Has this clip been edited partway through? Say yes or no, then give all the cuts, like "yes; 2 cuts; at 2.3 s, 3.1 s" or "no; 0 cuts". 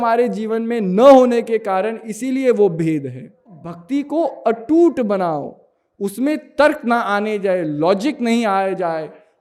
yes; 1 cut; at 3.7 s